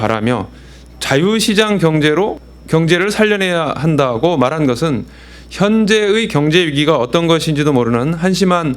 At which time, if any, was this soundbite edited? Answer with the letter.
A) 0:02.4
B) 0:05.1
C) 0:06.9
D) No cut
A